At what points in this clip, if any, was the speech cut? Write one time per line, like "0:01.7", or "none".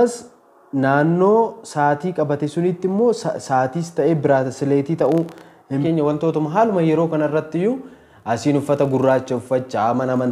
0:05.8